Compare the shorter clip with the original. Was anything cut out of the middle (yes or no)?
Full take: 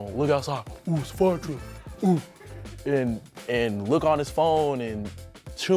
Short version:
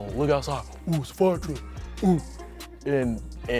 no